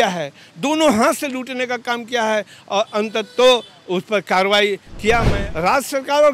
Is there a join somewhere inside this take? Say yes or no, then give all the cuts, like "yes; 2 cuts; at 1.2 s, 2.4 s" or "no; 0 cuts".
yes; 1 cut; at 5.4 s